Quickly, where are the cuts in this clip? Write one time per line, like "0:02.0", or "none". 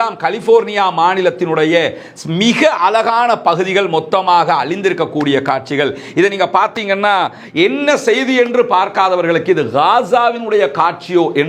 none